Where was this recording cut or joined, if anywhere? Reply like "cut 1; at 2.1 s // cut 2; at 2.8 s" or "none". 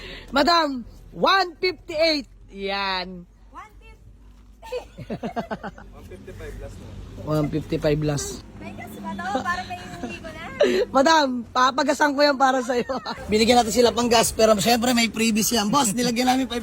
cut 1; at 5.6 s // cut 2; at 8.5 s // cut 3; at 13.2 s